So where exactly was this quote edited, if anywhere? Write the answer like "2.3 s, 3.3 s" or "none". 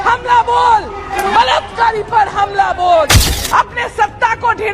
1.0 s, 3.3 s